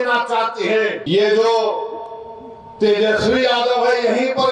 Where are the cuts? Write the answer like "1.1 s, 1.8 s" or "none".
1.0 s